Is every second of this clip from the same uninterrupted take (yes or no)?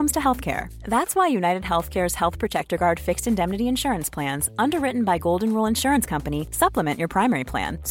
yes